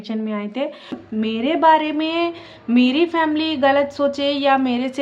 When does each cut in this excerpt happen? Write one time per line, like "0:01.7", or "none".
0:01.0

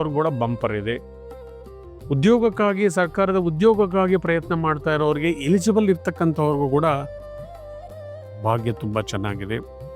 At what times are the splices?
none

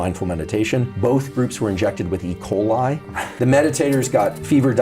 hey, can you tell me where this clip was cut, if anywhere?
0:03.3

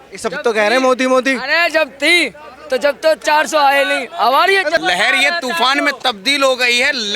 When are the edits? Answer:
0:04.8

